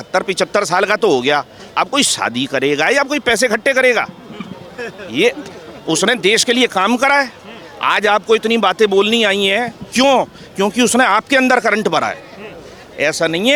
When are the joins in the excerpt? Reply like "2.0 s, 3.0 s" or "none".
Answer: none